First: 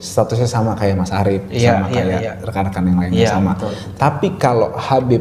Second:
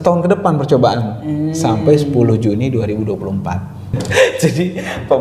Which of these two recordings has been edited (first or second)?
second